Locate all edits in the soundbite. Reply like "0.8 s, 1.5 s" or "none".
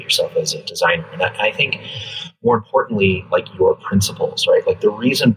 none